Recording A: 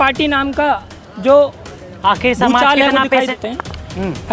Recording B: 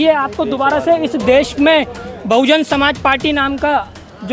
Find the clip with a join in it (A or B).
A